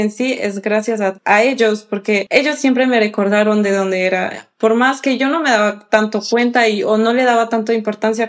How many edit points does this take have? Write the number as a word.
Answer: two